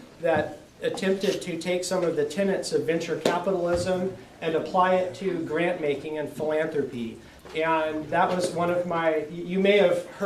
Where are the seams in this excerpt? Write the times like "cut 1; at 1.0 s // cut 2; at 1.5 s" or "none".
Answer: cut 1; at 3.0 s